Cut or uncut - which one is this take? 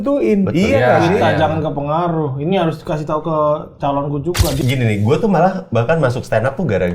cut